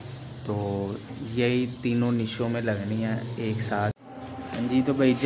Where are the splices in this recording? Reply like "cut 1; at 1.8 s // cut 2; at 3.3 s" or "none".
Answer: cut 1; at 4.0 s